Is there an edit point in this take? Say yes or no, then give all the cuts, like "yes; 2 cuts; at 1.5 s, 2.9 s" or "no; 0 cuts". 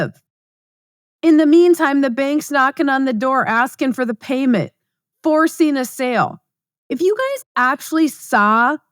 no; 0 cuts